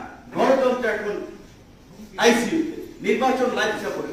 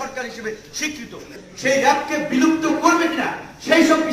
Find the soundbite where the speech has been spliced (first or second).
second